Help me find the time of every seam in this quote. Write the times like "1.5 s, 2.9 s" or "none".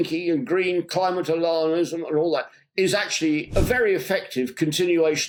none